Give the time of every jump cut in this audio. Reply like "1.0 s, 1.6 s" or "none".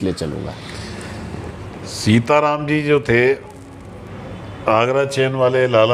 none